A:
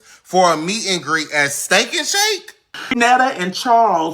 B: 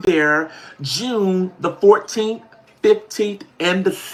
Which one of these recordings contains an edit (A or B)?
A